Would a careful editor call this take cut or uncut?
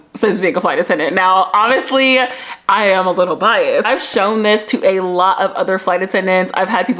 uncut